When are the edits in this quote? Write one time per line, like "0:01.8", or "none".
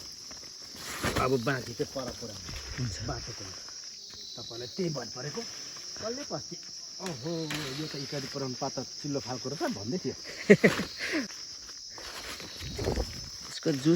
0:11.3